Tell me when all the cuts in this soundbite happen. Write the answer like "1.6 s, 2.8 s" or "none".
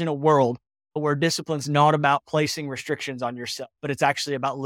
1.0 s